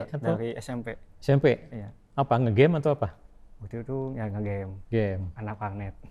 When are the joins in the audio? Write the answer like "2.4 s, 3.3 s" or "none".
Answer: none